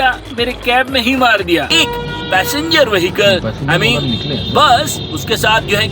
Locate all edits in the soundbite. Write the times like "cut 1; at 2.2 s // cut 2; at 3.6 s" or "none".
cut 1; at 1.7 s